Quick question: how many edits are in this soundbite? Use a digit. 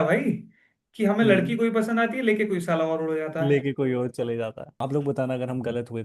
1